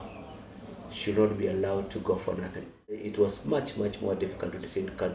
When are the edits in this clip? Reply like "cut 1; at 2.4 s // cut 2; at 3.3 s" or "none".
cut 1; at 3.1 s

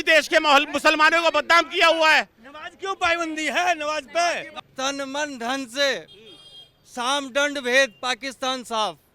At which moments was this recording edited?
cut 1; at 4.6 s

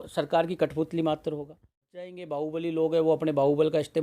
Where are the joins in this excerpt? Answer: cut 1; at 1.8 s

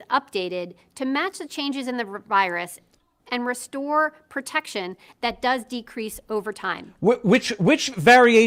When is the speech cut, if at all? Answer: none

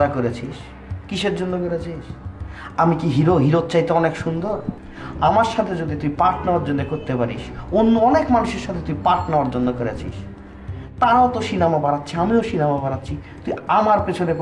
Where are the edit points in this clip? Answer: cut 1; at 4.7 s

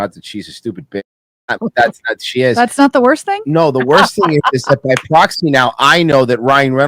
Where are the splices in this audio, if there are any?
cut 1; at 1.6 s

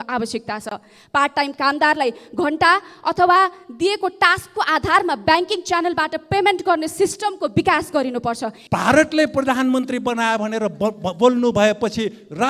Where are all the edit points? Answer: cut 1; at 8.5 s

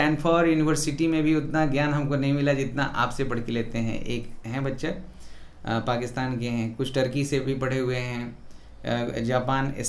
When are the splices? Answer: none

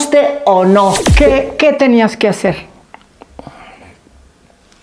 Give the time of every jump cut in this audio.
cut 1; at 1.0 s

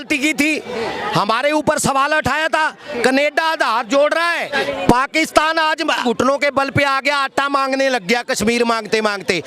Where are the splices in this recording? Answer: cut 1; at 4.5 s // cut 2; at 6.0 s

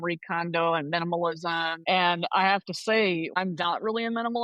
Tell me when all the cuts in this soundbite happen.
cut 1; at 1.7 s // cut 2; at 3.4 s

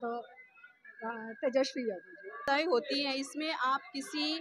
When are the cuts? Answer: cut 1; at 2.4 s

